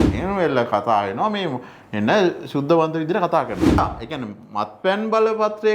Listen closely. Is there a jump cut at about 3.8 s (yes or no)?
yes